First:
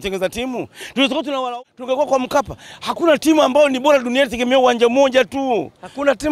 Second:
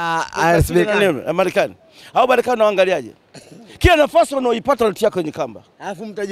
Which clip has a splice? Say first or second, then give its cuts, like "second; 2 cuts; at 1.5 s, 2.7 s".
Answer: first; 1 cut; at 1.5 s